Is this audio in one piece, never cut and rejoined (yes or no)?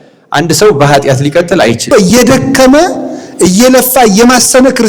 no